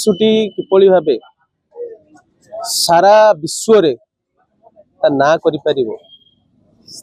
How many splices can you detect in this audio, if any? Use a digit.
0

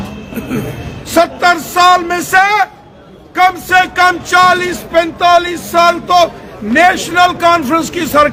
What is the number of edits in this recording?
0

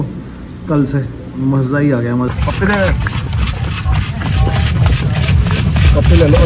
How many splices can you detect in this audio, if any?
1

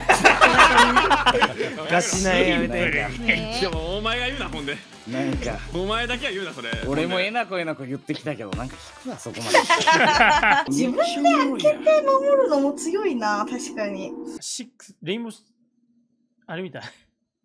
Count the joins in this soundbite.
2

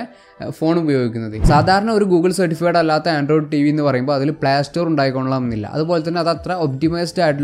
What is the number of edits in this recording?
1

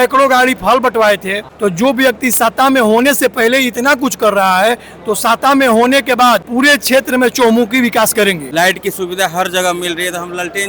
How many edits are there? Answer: 3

